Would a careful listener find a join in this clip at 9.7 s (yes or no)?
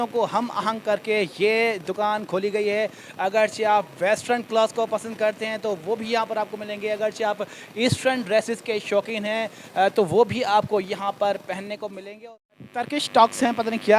no